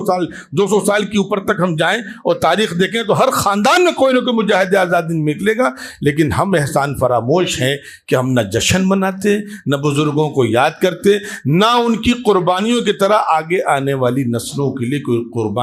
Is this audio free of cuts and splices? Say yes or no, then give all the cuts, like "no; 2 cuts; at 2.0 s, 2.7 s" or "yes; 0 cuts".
yes; 0 cuts